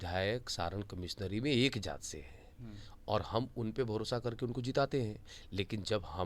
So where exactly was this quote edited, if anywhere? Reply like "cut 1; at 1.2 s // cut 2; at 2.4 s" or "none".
none

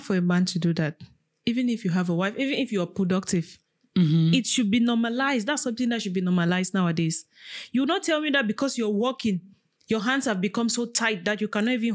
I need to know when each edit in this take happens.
none

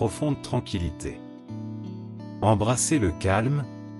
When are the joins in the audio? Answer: cut 1; at 1.1 s // cut 2; at 2.4 s

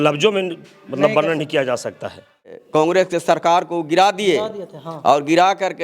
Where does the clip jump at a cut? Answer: cut 1; at 2.5 s

